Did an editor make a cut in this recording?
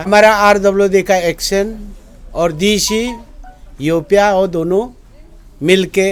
no; 0 cuts

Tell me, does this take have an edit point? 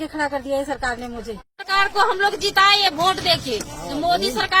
no; 0 cuts

